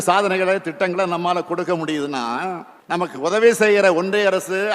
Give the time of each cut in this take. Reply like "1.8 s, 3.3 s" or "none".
2.7 s